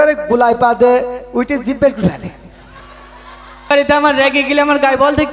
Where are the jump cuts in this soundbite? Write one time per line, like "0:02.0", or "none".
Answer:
0:03.7